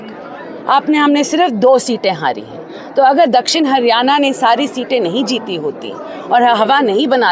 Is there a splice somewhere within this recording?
no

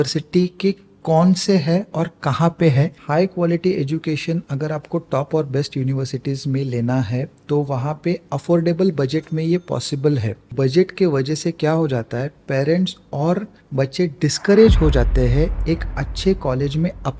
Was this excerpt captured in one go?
no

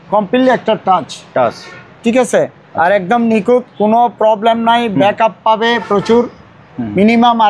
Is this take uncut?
yes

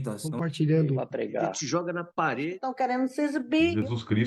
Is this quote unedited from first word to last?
yes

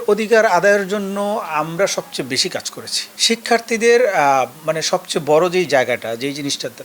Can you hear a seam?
no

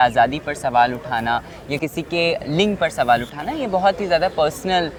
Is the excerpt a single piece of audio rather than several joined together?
yes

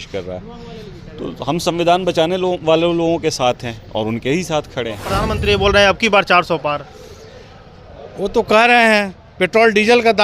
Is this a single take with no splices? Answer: no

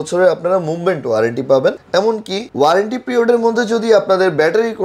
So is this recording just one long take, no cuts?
yes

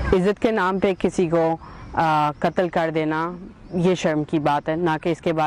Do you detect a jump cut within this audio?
no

